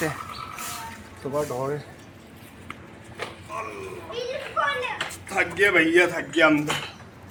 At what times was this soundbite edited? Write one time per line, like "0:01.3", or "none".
none